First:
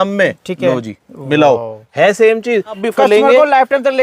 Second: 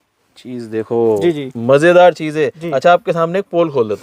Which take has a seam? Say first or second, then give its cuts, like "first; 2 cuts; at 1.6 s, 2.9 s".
first; 1 cut; at 2.8 s